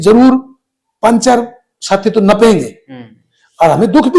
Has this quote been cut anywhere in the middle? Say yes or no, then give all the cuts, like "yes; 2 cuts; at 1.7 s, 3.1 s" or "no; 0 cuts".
no; 0 cuts